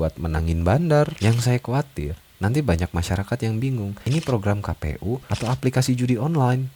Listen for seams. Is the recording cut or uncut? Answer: cut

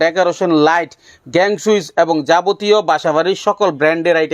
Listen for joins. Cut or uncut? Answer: uncut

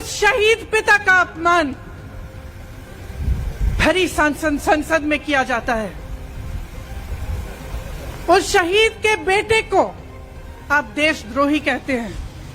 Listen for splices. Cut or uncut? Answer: uncut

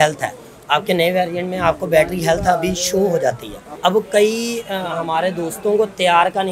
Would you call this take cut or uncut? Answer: cut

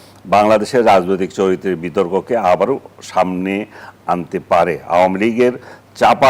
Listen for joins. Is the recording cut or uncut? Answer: uncut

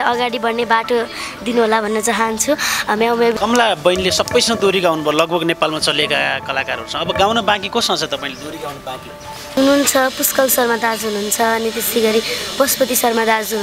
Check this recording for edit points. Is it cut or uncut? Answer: cut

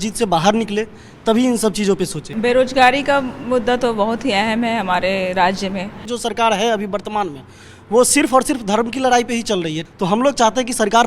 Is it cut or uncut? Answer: cut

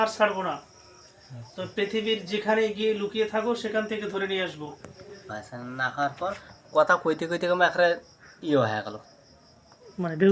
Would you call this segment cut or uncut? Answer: cut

